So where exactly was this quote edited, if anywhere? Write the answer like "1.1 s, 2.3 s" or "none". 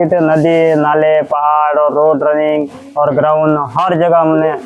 none